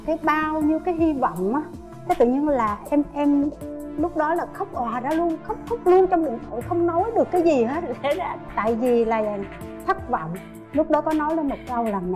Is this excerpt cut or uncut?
uncut